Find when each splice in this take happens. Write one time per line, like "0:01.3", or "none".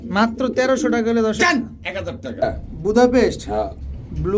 0:02.4